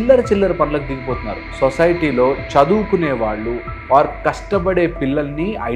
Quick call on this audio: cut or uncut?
cut